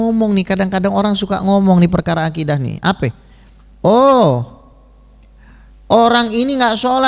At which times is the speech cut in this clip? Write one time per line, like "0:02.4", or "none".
none